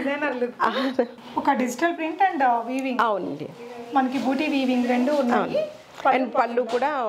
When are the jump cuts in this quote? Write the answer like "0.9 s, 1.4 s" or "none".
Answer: 1.2 s